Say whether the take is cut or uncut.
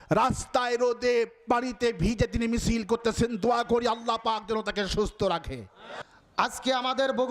uncut